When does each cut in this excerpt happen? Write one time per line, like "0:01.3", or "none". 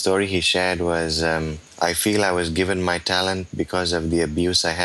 none